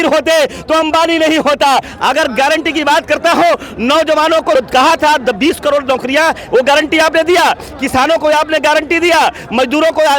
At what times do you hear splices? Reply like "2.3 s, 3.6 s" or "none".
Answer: 1.9 s, 4.5 s